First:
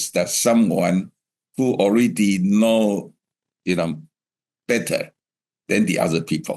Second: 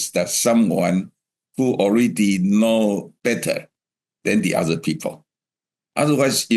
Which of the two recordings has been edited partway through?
second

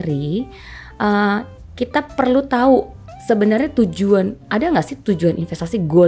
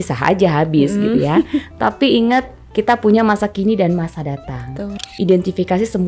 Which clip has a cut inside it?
second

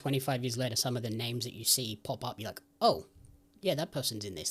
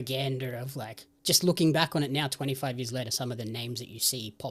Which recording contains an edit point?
second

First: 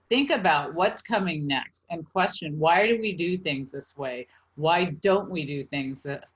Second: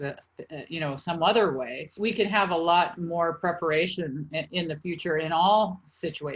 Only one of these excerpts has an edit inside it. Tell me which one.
second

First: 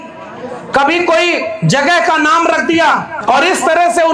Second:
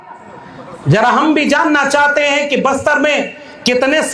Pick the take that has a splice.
first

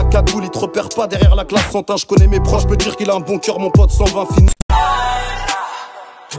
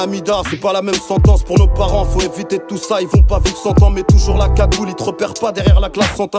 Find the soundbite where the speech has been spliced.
first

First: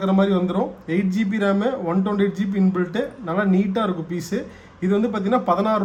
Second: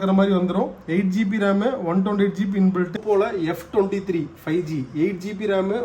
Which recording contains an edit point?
second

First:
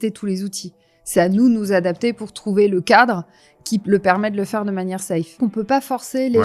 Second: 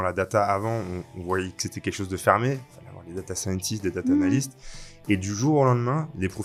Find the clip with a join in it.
first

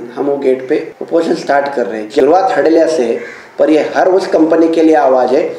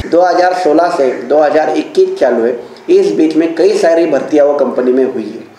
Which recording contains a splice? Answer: first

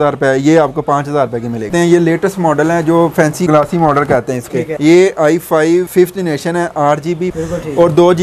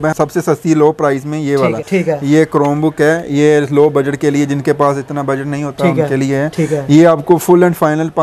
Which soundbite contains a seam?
first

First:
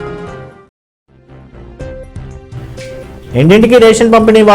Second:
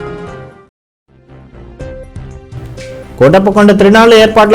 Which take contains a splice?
second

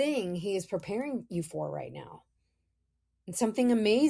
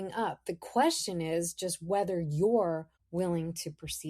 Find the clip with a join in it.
second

